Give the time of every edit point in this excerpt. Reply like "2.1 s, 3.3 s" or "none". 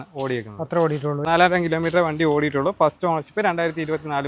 1.2 s